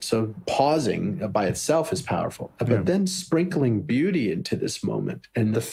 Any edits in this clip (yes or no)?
no